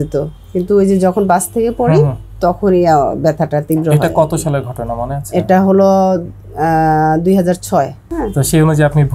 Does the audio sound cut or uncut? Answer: cut